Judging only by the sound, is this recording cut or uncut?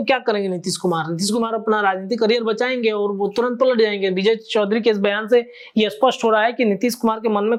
uncut